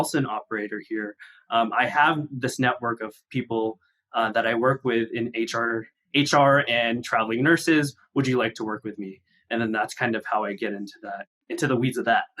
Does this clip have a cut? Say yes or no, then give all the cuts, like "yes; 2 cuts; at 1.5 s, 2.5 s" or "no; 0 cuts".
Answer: yes; 2 cuts; at 5.9 s, 11.3 s